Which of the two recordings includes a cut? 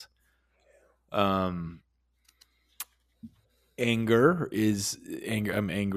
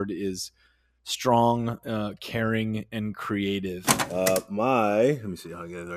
second; 1 cut; at 3.9 s

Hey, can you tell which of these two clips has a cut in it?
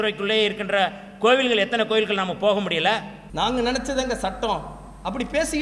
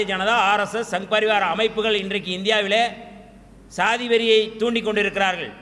first; 1 cut; at 3.2 s

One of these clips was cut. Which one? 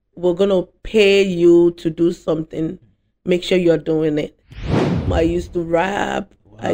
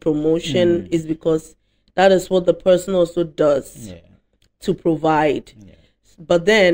first; 1 cut; at 4.9 s

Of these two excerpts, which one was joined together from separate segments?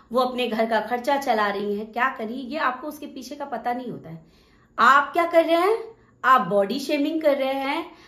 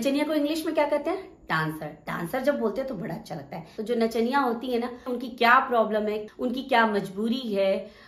second; 3 cuts; at 3.7 s, 5.0 s, 6.2 s

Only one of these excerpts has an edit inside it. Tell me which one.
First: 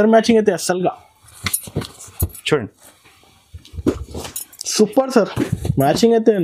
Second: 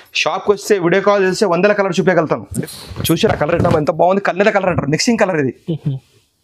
second; 1 cut; at 2.5 s

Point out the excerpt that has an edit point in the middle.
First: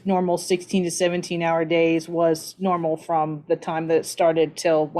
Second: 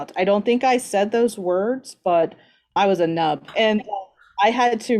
second; 2 cuts; at 2.7 s, 3.5 s

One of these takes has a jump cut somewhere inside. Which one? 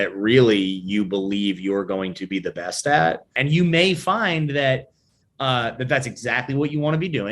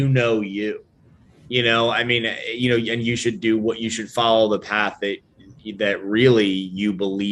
first; 1 cut; at 3.3 s

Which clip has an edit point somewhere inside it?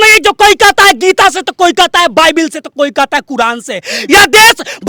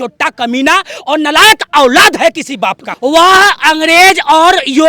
second; 1 cut; at 2.9 s

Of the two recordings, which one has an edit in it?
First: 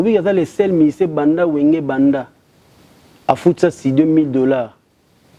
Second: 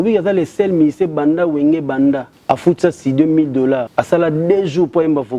second; 2 cuts; at 2.3 s, 3.9 s

